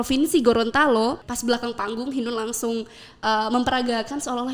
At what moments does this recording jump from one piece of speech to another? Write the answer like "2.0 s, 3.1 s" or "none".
1.3 s